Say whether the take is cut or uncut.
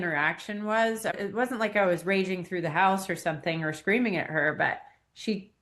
cut